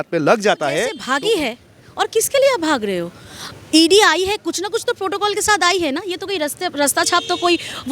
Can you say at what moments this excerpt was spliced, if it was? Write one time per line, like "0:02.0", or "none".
0:01.0